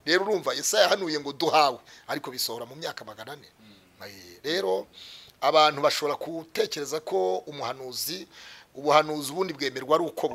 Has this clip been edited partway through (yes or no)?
no